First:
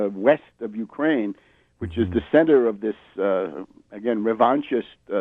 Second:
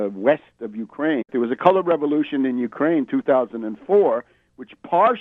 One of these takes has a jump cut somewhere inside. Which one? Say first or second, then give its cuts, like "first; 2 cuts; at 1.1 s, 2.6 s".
first; 1 cut; at 1.3 s